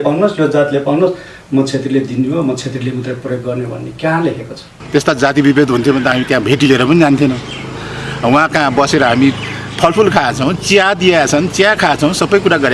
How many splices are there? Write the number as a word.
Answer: one